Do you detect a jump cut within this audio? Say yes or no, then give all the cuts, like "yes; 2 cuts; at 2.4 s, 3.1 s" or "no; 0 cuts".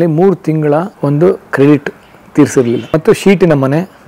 yes; 1 cut; at 0.9 s